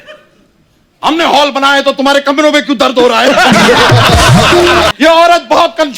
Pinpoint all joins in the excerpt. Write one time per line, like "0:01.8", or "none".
0:04.9